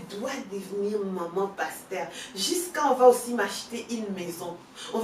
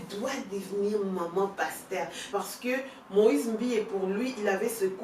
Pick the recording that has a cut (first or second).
second